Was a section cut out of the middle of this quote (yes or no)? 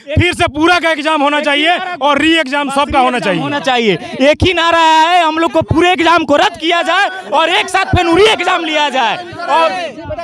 no